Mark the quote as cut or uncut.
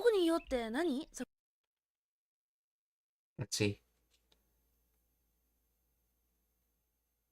uncut